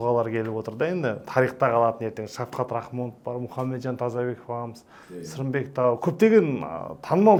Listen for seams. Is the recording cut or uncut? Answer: uncut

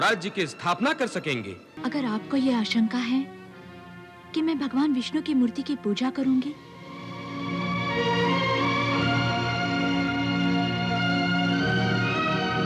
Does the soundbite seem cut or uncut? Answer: cut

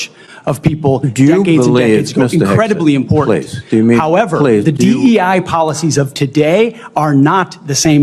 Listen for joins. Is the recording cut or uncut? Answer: uncut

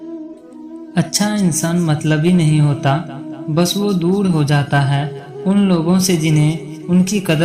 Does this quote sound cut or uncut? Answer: cut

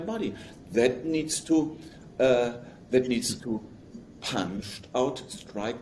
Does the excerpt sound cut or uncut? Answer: uncut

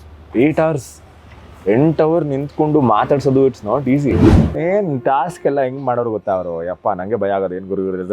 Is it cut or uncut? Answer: cut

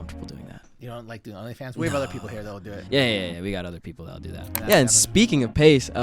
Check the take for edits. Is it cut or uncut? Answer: cut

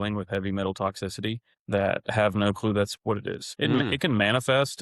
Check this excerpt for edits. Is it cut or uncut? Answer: cut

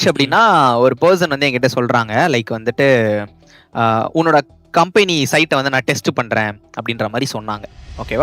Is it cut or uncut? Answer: uncut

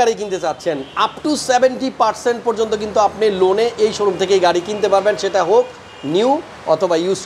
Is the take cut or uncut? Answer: uncut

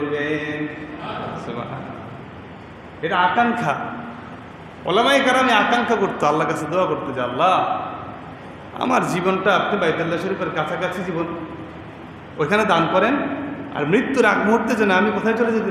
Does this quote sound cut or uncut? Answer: uncut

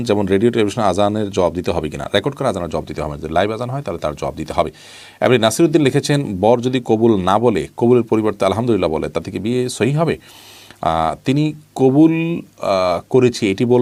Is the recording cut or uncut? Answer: uncut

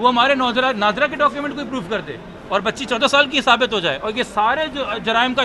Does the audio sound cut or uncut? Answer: uncut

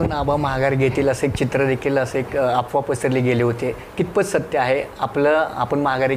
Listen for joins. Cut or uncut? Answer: uncut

